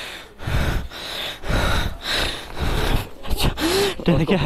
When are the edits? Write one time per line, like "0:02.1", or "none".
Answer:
none